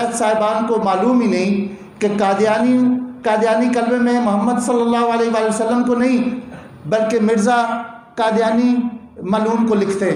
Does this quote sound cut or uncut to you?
uncut